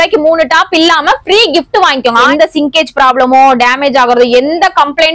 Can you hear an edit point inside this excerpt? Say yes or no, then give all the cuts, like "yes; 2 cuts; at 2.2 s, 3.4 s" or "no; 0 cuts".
yes; 1 cut; at 2.3 s